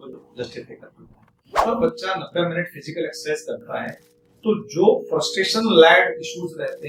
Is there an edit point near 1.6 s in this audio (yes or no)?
yes